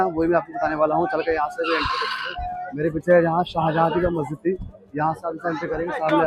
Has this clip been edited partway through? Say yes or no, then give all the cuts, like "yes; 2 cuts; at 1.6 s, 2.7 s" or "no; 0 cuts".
no; 0 cuts